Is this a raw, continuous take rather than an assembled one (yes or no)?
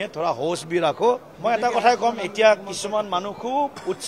no